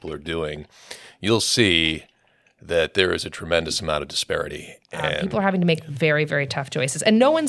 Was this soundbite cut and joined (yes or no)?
yes